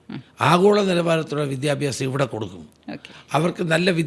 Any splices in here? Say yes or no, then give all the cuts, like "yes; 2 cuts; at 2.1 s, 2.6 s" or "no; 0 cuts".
no; 0 cuts